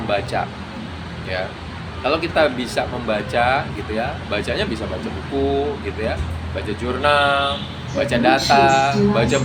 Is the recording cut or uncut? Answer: uncut